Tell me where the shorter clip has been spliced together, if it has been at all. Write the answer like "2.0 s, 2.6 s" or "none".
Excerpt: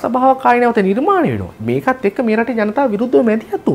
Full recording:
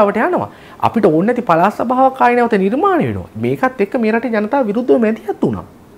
none

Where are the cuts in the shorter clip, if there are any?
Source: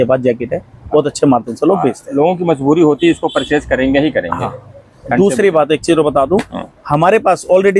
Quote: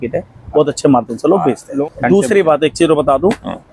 1.7 s

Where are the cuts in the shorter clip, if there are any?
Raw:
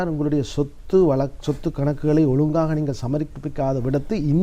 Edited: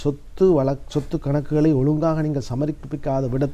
none

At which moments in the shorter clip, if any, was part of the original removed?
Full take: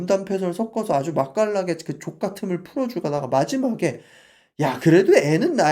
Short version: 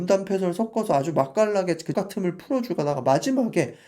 1.9 s

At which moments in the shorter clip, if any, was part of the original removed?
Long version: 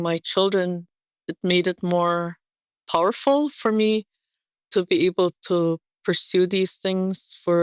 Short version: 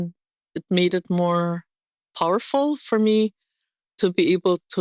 none

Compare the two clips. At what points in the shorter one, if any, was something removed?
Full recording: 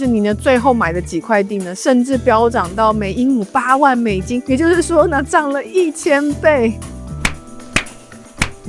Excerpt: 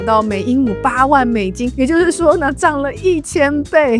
none

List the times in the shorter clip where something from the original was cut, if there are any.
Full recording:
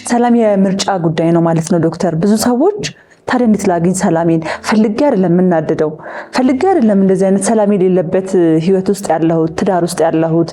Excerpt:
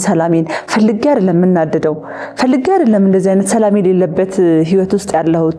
none

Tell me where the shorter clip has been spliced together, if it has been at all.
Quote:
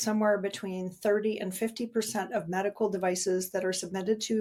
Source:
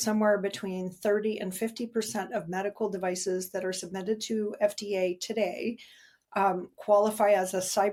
none

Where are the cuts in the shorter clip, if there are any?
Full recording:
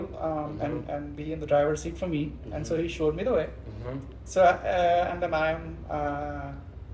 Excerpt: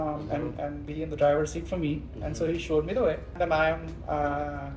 3.3 s

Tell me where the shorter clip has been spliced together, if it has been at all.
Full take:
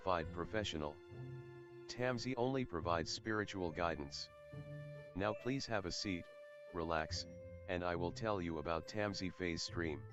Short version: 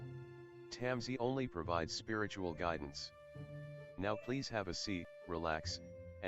5.1 s

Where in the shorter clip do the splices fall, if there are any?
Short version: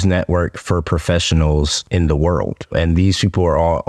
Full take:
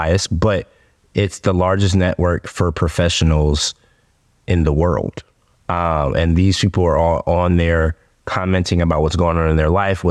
1.8 s, 2.7 s

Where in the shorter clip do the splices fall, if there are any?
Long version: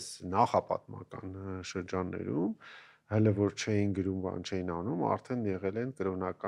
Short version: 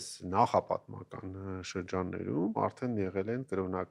2.6 s

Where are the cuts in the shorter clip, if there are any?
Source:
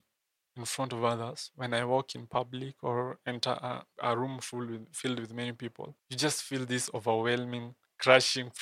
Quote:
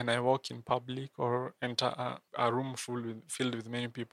none

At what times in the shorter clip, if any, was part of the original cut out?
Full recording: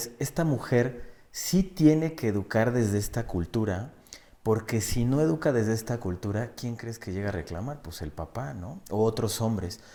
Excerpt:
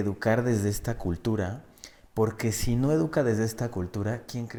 none

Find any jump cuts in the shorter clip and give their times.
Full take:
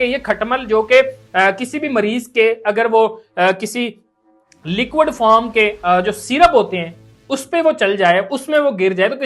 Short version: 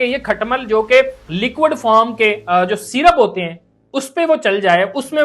1.2 s

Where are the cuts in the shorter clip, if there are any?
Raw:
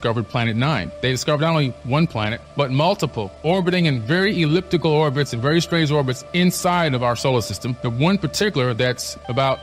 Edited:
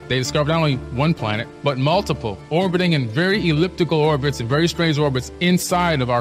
none

